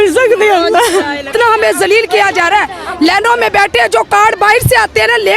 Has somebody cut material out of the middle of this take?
yes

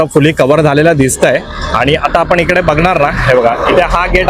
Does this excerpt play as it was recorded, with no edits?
yes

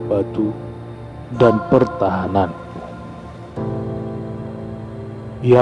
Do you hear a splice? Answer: yes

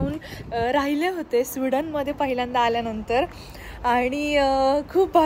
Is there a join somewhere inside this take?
no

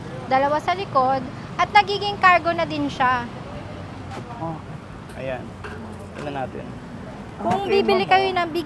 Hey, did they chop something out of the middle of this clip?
no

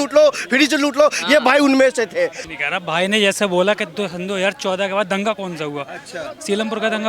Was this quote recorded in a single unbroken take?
no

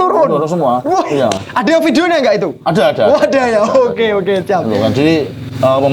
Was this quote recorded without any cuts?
yes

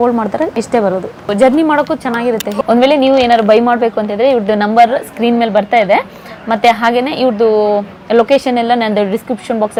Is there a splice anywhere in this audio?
no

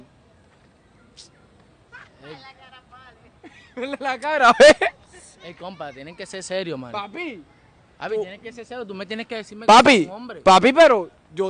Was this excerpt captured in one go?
yes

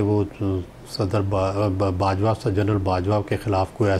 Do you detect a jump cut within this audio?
no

